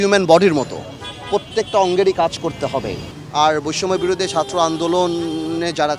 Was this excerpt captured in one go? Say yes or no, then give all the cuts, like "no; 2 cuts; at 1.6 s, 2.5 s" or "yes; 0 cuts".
no; 1 cut; at 3.0 s